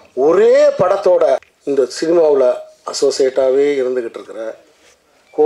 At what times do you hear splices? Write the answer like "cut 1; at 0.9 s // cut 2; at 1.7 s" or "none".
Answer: cut 1; at 1.5 s